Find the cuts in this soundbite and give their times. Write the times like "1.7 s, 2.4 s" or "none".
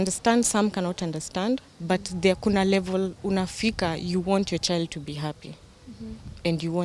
none